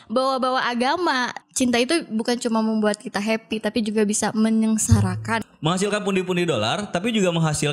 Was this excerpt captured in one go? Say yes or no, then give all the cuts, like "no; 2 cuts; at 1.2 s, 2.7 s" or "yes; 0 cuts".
no; 2 cuts; at 1.3 s, 5.5 s